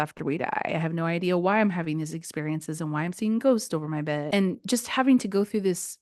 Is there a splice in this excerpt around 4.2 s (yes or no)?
yes